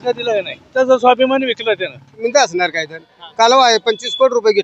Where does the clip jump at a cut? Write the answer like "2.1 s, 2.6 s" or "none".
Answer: 0.7 s, 2.2 s, 3.2 s

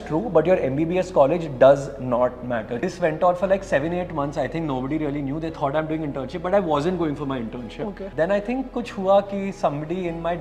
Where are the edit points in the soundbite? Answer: 2.8 s, 8.0 s

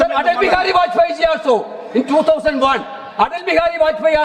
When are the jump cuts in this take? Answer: none

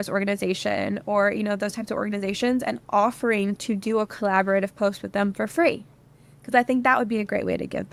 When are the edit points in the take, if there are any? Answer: none

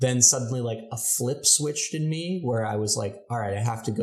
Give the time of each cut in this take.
none

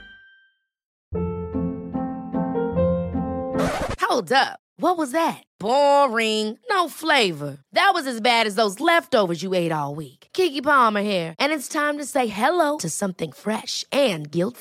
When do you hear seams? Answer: 0.9 s

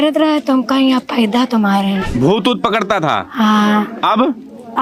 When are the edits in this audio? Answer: none

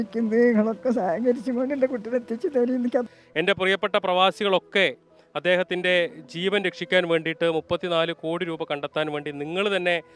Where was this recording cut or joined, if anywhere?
3.1 s

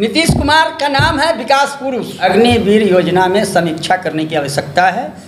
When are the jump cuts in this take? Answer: 2.2 s

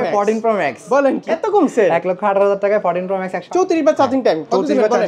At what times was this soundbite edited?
1.2 s, 3.4 s

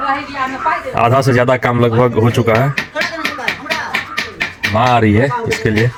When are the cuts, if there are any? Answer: none

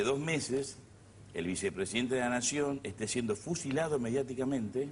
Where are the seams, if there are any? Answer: none

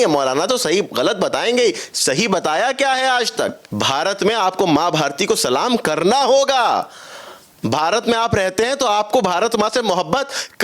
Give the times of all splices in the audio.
3.6 s

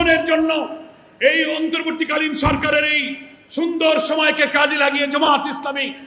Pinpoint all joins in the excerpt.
none

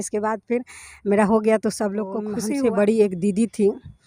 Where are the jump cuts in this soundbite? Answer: 2.3 s

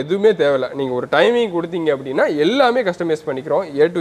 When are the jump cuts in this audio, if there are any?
none

